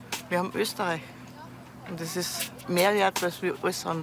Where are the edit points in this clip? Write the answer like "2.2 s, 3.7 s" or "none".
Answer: 2.6 s